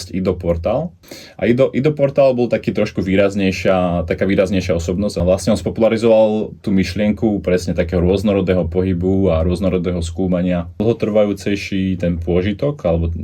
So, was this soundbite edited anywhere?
yes; 3 cuts; at 1.0 s, 5.2 s, 10.7 s

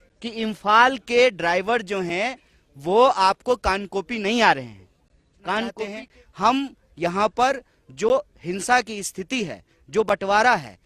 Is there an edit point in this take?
yes; 1 cut; at 5.8 s

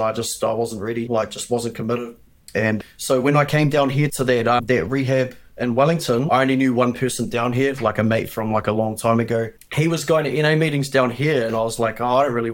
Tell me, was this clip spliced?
yes; 2 cuts; at 6.3 s, 9.7 s

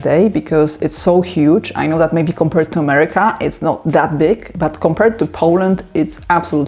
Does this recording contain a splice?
no; 0 cuts

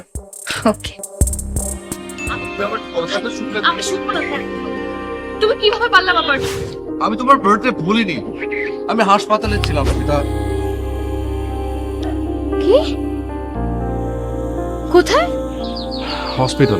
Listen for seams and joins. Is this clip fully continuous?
no; 1 cut; at 2.2 s

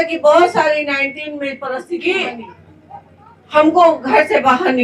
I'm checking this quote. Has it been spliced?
yes; 1 cut; at 1.7 s

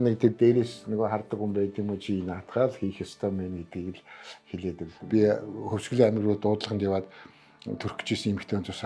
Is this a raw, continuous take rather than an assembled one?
no; 1 cut; at 4.9 s

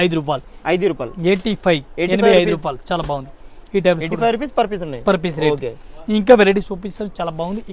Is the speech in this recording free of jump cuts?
yes; 0 cuts

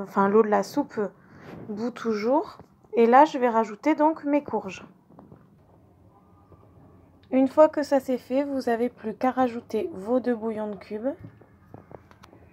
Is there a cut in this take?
no; 0 cuts

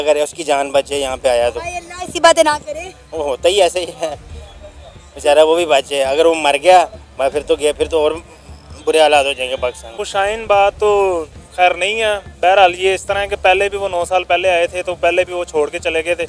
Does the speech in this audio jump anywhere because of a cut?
no; 0 cuts

